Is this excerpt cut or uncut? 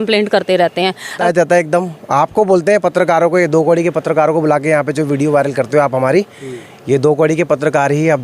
cut